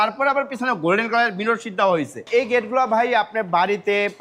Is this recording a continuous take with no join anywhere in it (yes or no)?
no